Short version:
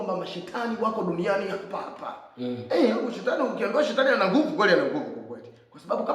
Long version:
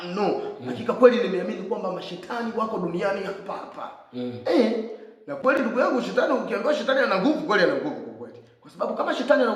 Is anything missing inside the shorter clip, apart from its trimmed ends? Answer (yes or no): yes